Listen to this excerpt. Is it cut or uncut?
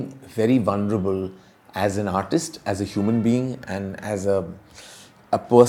uncut